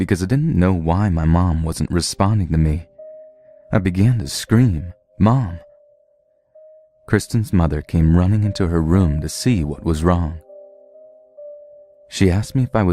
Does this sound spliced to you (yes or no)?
no